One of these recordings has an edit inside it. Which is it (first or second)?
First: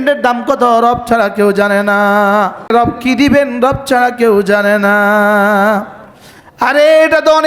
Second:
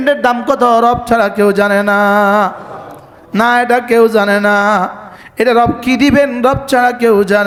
first